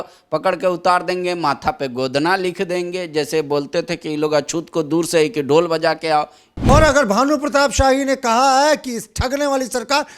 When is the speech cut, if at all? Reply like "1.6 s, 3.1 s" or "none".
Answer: 6.5 s

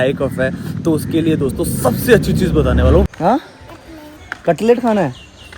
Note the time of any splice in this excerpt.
3.1 s

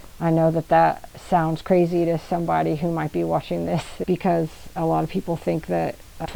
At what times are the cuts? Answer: none

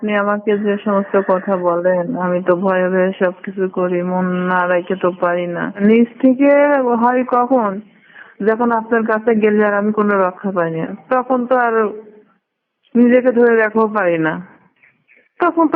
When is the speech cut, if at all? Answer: 5.8 s

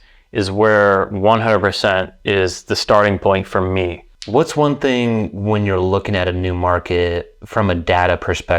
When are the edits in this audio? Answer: 4.1 s

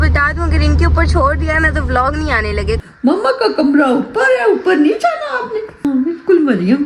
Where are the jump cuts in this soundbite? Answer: 2.8 s, 5.9 s

